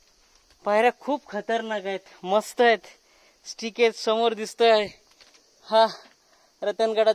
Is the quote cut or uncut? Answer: uncut